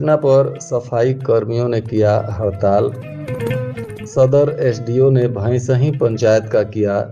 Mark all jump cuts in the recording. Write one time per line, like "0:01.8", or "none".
none